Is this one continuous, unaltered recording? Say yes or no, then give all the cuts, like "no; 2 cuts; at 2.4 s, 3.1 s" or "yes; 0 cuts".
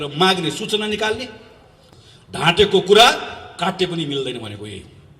no; 1 cut; at 1.8 s